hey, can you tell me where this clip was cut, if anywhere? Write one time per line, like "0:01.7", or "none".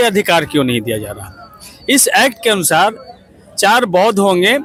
none